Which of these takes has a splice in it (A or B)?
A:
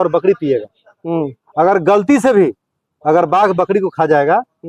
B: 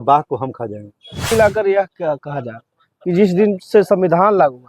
B